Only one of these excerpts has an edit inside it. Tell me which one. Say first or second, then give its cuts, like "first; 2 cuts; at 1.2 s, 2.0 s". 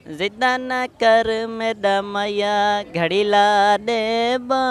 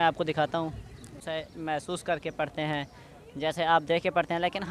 second; 1 cut; at 1.2 s